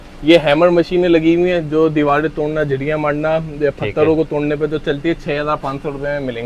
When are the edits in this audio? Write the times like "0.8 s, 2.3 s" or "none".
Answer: none